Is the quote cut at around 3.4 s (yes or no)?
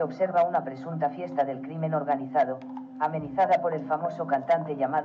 no